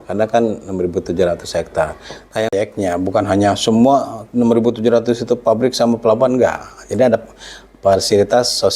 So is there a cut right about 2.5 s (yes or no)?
yes